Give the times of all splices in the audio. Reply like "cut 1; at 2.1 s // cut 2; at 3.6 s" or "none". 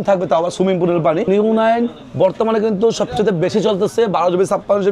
cut 1; at 1.3 s

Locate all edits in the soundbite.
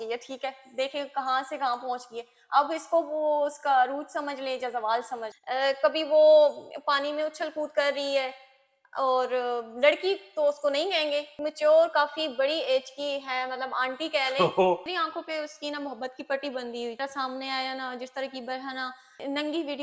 cut 1; at 5.3 s // cut 2; at 14.9 s // cut 3; at 17.0 s

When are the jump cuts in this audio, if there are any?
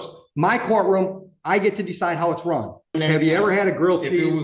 cut 1; at 3.0 s

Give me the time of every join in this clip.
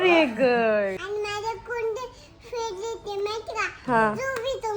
cut 1; at 1.0 s

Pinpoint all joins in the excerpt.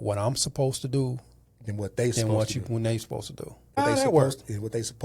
cut 1; at 3.8 s

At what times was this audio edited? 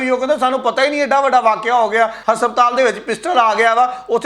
cut 1; at 2.2 s

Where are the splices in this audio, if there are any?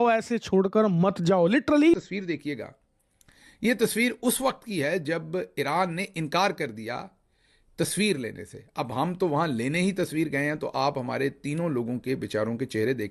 cut 1; at 1.9 s

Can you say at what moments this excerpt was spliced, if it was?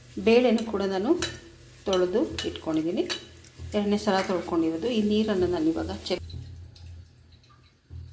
cut 1; at 6.2 s

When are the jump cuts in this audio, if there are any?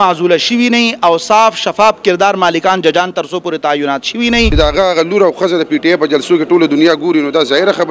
cut 1; at 4.5 s

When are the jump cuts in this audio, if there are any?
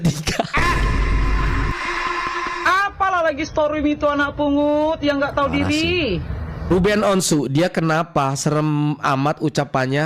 cut 1; at 2.7 s // cut 2; at 6.7 s

